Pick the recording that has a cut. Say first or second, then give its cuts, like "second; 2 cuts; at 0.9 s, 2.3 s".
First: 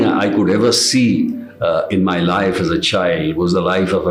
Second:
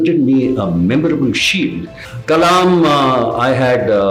second; 1 cut; at 1.9 s